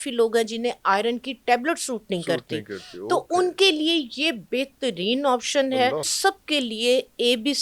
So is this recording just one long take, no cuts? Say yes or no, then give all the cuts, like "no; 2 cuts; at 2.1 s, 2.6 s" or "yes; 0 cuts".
no; 1 cut; at 6.1 s